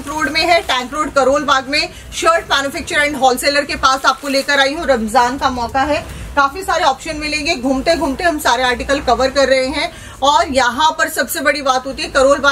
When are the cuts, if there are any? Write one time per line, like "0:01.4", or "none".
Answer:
none